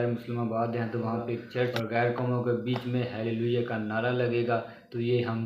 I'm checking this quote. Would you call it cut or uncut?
cut